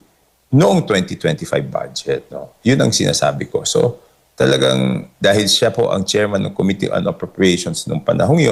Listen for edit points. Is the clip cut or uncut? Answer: uncut